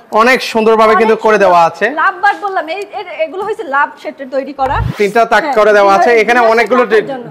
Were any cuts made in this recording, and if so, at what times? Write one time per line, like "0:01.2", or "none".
0:04.8